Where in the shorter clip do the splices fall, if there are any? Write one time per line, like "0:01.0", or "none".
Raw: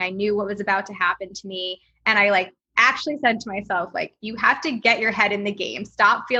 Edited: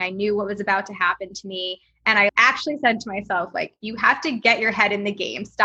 0:02.3